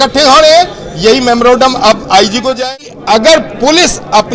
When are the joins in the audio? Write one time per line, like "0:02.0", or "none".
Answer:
0:02.6

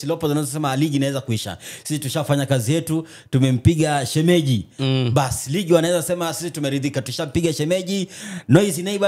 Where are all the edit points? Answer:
none

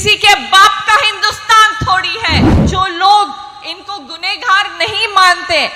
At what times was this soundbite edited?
0:02.6

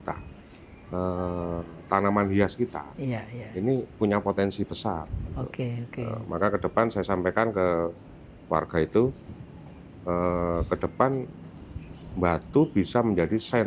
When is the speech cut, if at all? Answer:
none

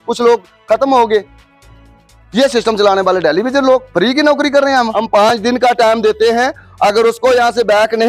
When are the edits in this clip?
0:04.9

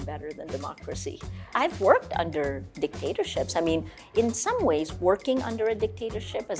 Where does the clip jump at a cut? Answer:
0:01.5

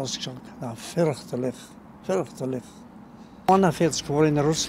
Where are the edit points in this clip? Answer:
0:03.5

